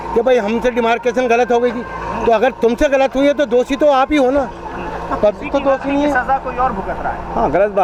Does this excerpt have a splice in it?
no; 0 cuts

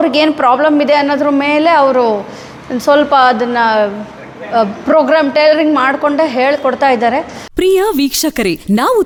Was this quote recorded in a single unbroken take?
yes; 0 cuts

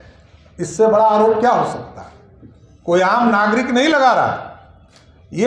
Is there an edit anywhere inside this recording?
no; 0 cuts

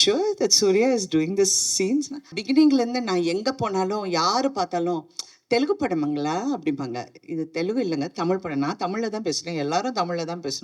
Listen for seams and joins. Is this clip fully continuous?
no; 1 cut; at 2.3 s

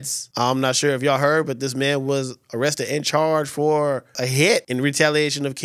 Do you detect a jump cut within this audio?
no; 0 cuts

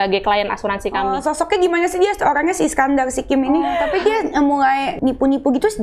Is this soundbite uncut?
no; 3 cuts; at 1.1 s, 3.6 s, 4.9 s

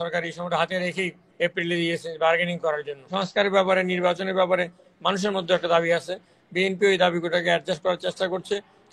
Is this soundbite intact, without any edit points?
no; 1 cut; at 3.1 s

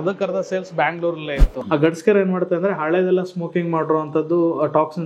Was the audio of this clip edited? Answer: yes; 1 cut; at 1.6 s

